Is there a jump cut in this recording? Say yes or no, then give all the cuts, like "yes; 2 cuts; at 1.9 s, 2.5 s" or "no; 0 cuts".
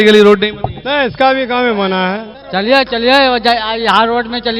yes; 1 cut; at 2.3 s